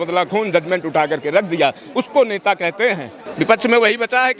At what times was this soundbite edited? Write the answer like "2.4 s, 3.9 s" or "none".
3.2 s